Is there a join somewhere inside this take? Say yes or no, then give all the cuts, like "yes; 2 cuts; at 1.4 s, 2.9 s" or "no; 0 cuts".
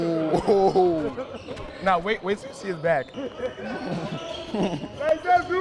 yes; 1 cut; at 3.1 s